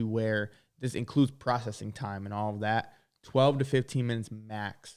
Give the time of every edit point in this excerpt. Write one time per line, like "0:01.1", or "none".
none